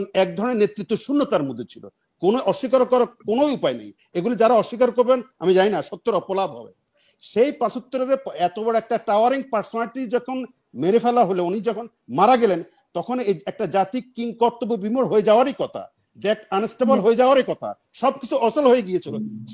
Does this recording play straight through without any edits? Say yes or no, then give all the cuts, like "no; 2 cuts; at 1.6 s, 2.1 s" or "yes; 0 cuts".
yes; 0 cuts